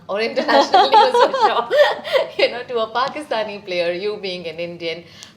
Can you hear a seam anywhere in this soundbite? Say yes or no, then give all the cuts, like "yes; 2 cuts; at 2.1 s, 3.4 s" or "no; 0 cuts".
no; 0 cuts